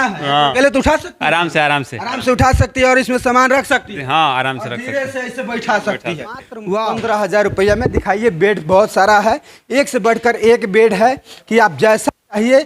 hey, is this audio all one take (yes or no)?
no